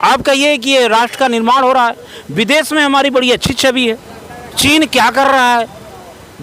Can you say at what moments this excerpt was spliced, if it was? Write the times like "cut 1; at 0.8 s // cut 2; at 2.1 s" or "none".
none